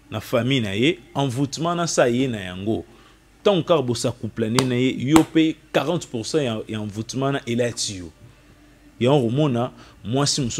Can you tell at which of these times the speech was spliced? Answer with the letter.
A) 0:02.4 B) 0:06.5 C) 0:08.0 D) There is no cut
D